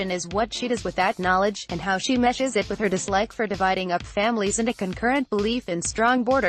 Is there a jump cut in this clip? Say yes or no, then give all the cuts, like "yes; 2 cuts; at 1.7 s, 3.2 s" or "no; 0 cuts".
no; 0 cuts